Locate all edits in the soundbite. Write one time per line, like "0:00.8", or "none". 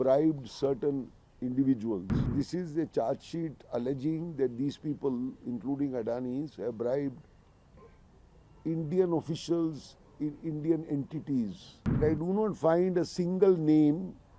0:02.3
0:12.0